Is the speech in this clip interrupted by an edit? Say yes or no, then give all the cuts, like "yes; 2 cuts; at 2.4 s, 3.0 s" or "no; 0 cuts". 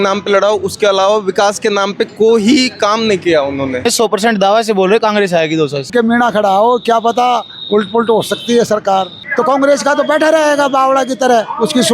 yes; 3 cuts; at 3.8 s, 5.9 s, 9.2 s